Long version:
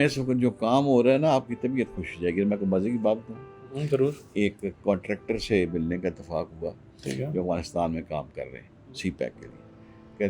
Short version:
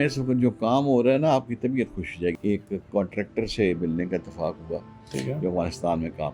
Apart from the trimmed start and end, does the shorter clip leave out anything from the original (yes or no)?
yes